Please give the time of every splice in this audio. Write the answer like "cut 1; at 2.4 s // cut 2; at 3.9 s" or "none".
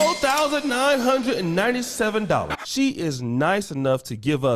none